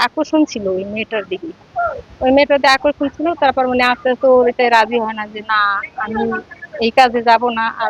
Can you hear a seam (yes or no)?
no